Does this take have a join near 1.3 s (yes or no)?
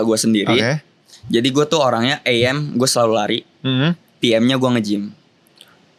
no